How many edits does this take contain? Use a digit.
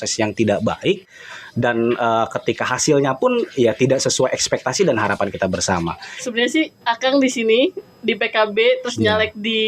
1